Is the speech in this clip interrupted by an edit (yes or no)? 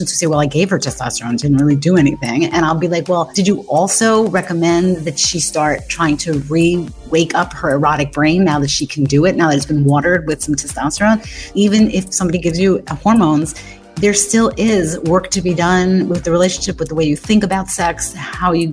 yes